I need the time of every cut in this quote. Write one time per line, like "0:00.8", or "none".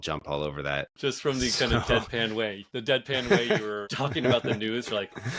0:00.9
0:02.7
0:03.8